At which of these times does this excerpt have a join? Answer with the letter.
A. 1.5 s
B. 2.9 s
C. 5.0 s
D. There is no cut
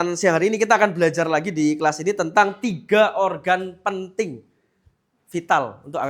D